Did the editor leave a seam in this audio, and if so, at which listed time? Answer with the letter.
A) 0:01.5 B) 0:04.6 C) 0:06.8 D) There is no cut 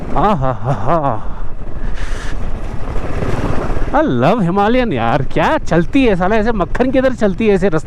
D